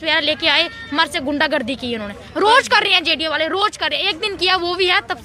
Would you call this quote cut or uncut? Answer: uncut